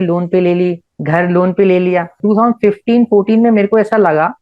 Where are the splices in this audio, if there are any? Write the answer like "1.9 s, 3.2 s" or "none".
2.1 s